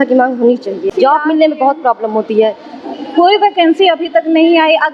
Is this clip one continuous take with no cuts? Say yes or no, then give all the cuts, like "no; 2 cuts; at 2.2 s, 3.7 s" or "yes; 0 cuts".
no; 1 cut; at 0.9 s